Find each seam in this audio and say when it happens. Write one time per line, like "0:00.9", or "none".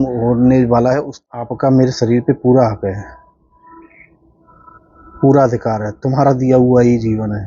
0:01.2